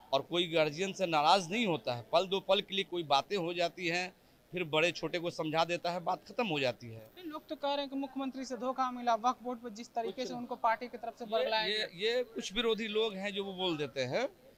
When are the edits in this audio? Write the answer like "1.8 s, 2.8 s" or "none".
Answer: none

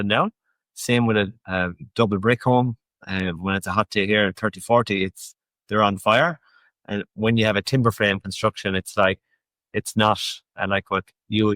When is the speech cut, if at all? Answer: 1.4 s

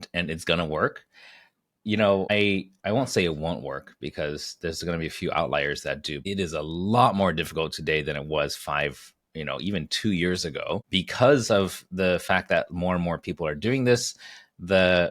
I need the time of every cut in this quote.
2.3 s, 6.2 s, 10.9 s

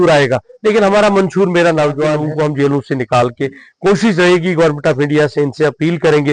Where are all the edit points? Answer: 2.2 s

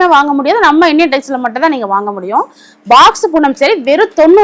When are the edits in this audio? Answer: none

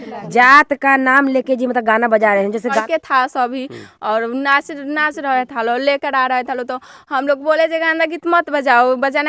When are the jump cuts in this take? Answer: 2.8 s

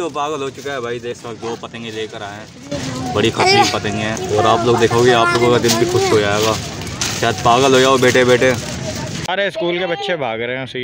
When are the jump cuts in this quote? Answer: 1.1 s, 4.2 s, 9.3 s

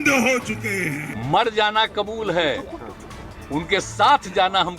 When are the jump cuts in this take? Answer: 1.1 s

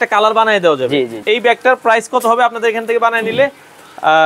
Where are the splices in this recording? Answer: 1.2 s

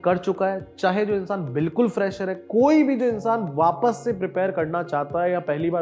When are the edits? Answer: none

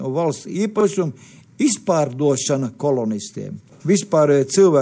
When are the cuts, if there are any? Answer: 3.7 s

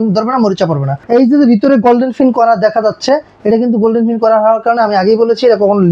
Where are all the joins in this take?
1.0 s

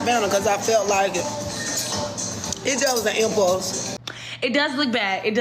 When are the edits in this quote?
3.8 s

